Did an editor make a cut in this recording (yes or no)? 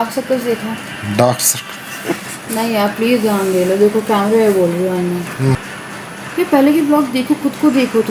yes